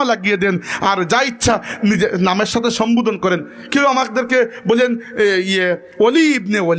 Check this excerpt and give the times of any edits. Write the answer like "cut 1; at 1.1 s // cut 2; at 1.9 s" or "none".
none